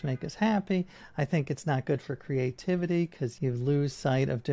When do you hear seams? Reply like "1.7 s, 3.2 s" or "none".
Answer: 3.3 s